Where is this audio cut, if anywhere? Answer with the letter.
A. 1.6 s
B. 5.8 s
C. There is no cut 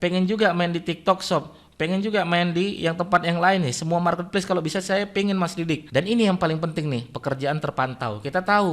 B